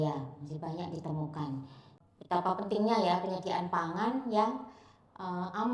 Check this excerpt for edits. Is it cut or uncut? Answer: cut